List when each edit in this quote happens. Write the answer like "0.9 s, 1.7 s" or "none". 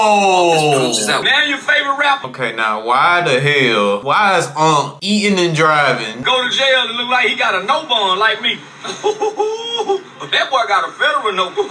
1.2 s, 2.3 s, 4.0 s, 5.0 s, 6.1 s